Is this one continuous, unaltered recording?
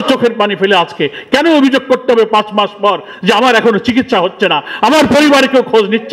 yes; 0 cuts

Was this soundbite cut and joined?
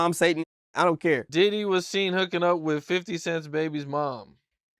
yes; 1 cut; at 1.3 s

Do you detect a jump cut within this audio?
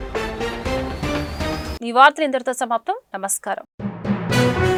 no; 0 cuts

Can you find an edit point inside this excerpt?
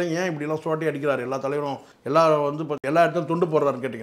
no; 0 cuts

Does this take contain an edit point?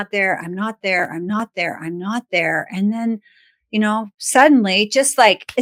no; 0 cuts

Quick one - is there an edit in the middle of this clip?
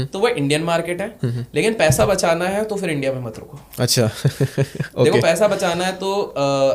no; 0 cuts

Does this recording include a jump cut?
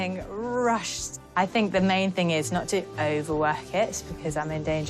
no; 0 cuts

